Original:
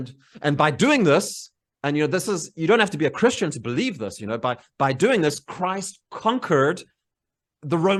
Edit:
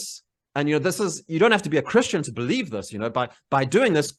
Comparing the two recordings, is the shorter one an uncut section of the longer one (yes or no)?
yes